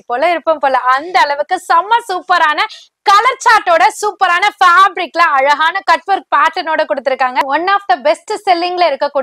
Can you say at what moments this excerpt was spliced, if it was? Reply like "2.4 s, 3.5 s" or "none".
7.4 s